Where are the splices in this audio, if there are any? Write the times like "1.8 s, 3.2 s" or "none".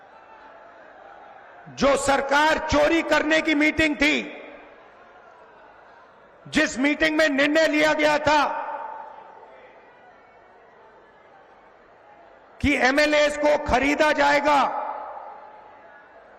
none